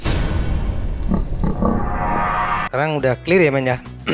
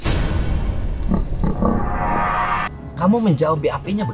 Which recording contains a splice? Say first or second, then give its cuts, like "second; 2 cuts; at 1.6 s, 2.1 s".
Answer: second; 1 cut; at 2.7 s